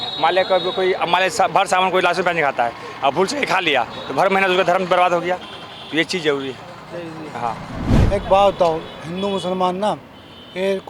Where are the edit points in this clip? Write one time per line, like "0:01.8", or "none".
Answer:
0:08.0